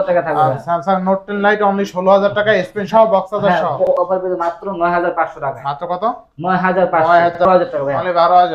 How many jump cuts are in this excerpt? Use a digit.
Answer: 2